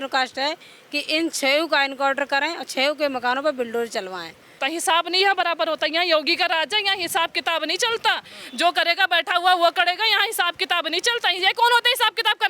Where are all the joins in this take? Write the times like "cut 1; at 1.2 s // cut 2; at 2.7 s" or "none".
cut 1; at 4.6 s